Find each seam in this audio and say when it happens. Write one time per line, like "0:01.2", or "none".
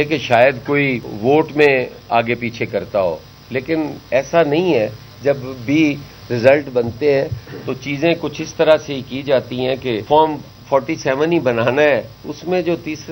0:01.1
0:10.0